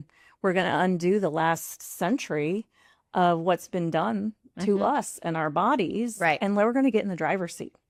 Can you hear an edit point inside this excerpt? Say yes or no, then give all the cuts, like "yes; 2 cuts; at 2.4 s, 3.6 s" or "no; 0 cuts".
no; 0 cuts